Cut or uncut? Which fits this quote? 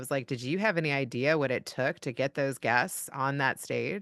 uncut